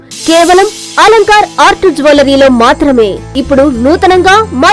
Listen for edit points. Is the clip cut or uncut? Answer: cut